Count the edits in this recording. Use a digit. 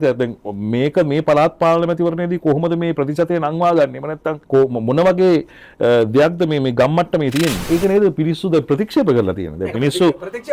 2